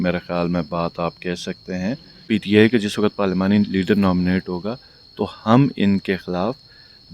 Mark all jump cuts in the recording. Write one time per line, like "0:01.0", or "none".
0:02.2